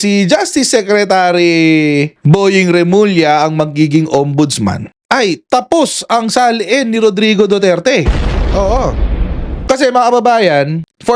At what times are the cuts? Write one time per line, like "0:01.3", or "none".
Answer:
0:09.5